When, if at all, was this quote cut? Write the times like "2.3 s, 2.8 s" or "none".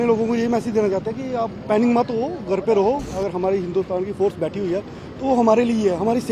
3.1 s